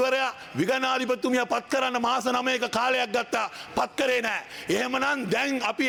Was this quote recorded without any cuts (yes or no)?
yes